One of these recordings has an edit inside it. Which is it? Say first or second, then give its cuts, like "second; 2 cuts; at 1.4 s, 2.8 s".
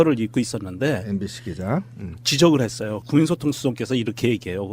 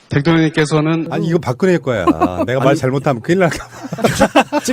second; 1 cut; at 1.0 s